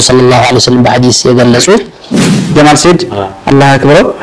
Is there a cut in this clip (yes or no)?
yes